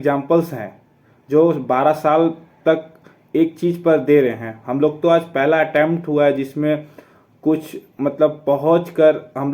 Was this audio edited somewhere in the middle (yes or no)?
no